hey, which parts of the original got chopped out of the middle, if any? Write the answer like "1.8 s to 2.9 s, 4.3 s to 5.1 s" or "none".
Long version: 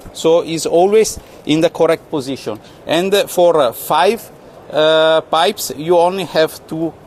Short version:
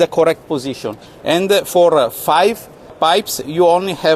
4.6 s to 5.3 s